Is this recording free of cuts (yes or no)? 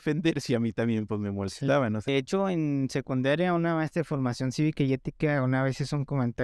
no